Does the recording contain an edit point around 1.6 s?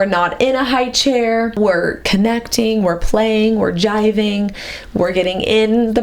yes; 1 cut; at 1.6 s

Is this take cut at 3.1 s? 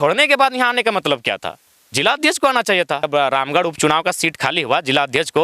yes; 1 cut; at 3.1 s

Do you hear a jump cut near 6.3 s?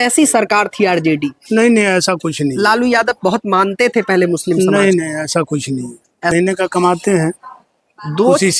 yes; 1 cut; at 6.3 s

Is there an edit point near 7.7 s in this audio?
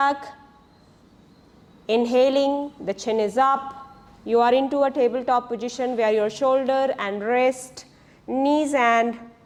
no; 0 cuts

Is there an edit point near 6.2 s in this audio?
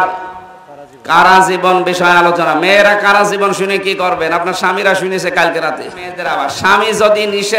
yes; 1 cut; at 6.2 s

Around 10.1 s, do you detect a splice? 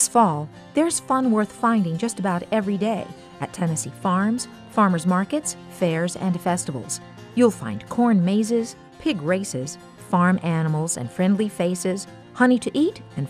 no; 0 cuts

